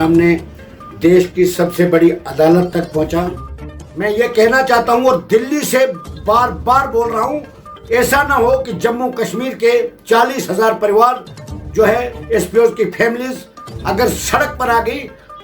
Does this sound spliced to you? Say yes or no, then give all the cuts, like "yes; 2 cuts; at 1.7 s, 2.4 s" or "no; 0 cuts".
yes; 1 cut; at 4.0 s